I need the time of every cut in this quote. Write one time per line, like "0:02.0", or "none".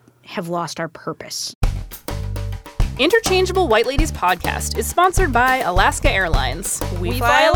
0:01.5